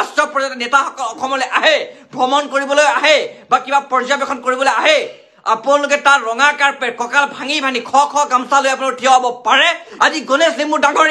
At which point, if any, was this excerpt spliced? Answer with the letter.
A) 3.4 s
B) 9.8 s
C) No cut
B